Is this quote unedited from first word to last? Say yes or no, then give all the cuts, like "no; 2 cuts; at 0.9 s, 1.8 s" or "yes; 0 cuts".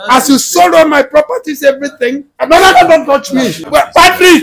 no; 2 cuts; at 2.3 s, 3.6 s